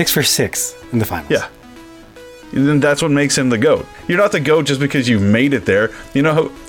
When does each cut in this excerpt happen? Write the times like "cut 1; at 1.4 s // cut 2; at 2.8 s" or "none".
cut 1; at 4.0 s